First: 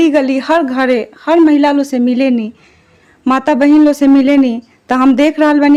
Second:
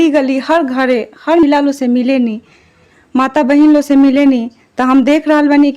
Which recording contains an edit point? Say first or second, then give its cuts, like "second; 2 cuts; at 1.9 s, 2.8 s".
second; 1 cut; at 1.4 s